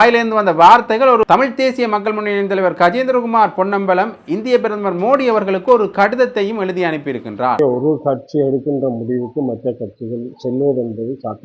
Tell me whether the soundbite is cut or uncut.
cut